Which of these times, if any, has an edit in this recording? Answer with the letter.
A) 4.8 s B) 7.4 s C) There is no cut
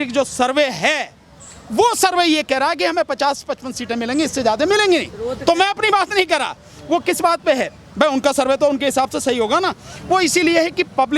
C